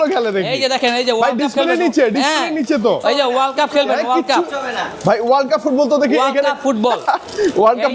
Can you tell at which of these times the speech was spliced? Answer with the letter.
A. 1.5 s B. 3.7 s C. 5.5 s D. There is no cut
D